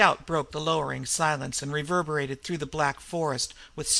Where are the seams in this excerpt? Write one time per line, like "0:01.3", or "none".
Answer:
0:01.0